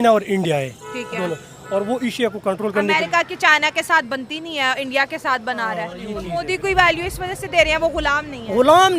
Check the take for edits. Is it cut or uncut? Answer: cut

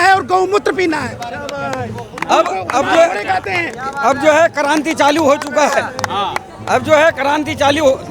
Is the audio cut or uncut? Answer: uncut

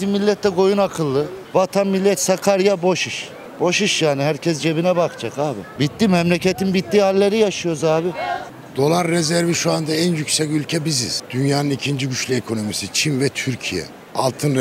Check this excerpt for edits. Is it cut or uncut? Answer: cut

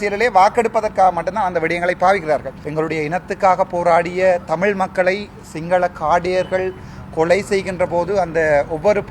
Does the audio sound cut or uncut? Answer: cut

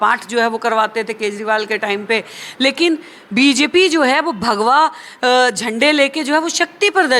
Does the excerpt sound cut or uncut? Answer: uncut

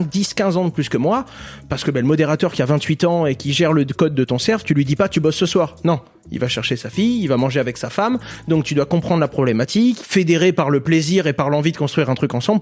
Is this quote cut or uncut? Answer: cut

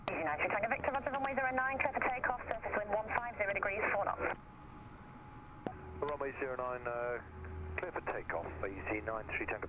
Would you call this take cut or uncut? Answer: uncut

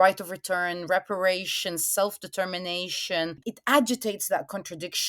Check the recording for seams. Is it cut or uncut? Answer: cut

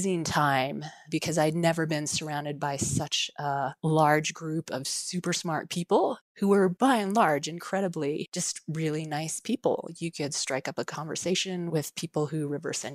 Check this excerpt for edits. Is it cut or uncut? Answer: uncut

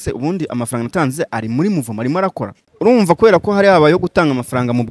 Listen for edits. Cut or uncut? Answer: cut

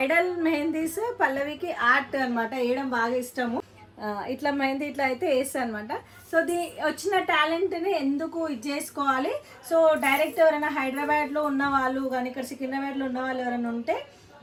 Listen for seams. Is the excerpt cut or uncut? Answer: uncut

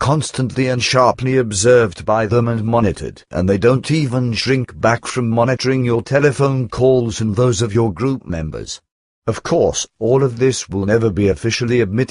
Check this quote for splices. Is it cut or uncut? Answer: uncut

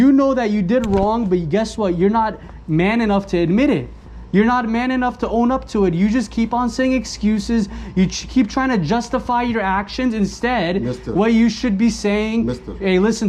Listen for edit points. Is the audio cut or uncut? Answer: uncut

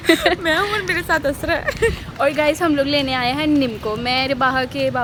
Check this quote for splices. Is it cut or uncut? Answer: uncut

